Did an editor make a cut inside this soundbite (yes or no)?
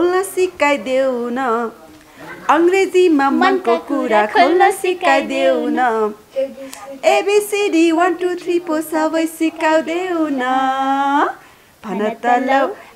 no